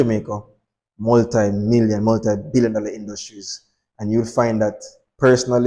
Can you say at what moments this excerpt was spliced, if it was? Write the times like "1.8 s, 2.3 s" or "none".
none